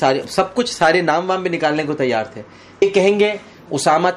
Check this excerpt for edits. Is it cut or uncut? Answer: cut